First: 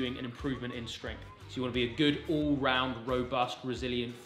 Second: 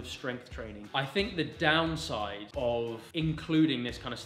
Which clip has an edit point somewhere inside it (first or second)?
second